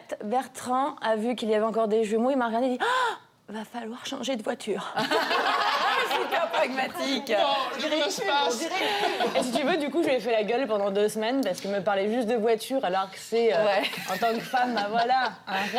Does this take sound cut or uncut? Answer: uncut